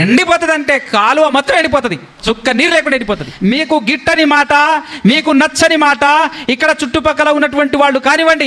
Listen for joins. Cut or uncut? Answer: cut